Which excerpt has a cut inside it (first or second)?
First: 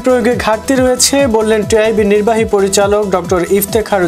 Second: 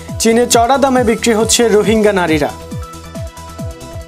second